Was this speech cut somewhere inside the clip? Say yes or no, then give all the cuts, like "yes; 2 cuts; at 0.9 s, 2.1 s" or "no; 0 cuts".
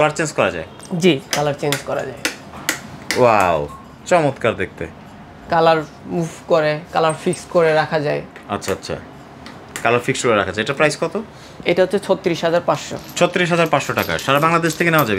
no; 0 cuts